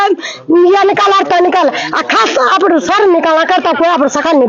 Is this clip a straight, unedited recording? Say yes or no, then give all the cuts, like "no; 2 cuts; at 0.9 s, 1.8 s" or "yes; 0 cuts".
yes; 0 cuts